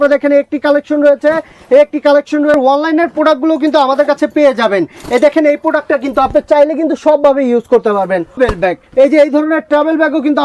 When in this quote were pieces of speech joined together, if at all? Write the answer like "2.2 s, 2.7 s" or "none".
2.5 s, 8.4 s